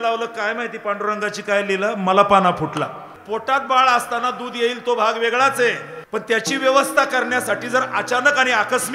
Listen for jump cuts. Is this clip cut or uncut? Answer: cut